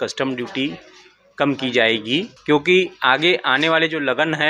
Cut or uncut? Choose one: cut